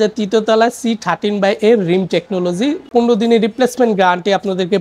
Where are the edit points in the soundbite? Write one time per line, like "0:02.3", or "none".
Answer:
0:02.9